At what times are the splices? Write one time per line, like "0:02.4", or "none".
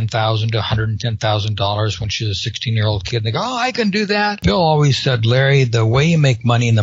0:04.4